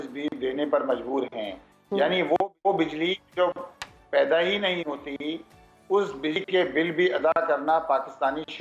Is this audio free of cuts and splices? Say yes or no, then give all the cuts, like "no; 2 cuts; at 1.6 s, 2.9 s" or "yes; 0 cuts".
yes; 0 cuts